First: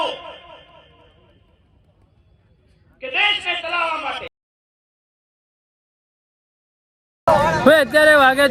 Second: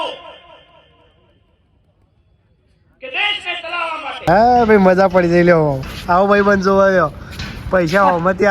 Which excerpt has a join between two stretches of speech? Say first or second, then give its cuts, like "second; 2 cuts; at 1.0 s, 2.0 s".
second; 1 cut; at 4.3 s